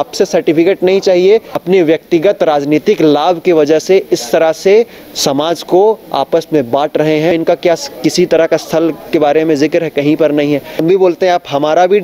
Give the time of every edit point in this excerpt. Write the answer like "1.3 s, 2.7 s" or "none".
1.5 s, 7.3 s, 10.8 s